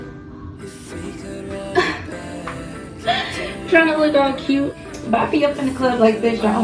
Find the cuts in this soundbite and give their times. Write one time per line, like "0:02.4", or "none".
0:04.8